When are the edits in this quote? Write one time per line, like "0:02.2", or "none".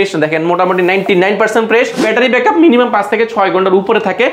0:02.0